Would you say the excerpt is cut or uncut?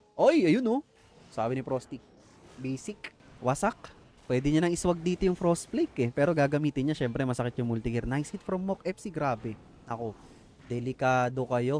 cut